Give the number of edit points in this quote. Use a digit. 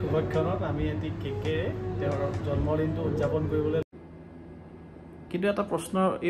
1